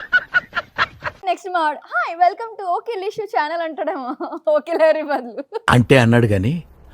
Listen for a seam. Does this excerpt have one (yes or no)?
yes